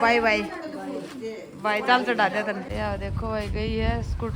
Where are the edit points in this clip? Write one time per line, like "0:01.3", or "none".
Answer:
none